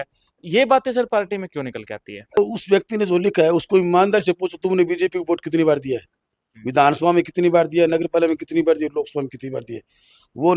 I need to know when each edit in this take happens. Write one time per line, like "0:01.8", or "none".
0:02.4